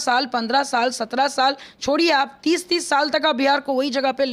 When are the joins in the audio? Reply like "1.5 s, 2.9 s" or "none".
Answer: none